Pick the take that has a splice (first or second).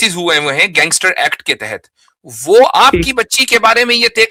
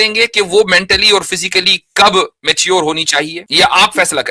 second